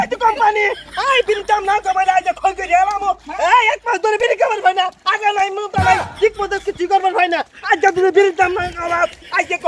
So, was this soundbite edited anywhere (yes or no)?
no